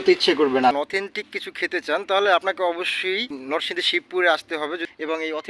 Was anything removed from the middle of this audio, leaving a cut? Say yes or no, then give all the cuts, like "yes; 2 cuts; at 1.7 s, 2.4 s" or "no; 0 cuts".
yes; 2 cuts; at 0.7 s, 3.4 s